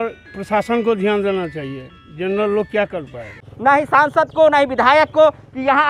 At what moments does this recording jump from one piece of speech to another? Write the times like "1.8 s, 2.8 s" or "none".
3.5 s